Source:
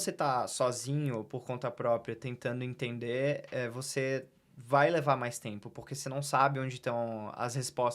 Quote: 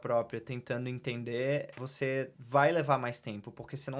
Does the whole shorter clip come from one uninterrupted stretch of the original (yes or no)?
no